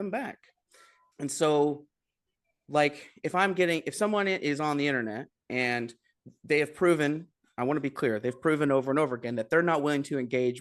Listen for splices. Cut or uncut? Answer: uncut